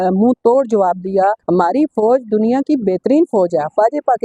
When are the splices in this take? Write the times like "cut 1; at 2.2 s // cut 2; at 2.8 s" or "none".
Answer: cut 1; at 1.4 s